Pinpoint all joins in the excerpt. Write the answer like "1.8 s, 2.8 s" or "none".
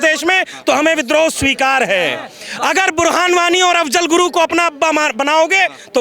none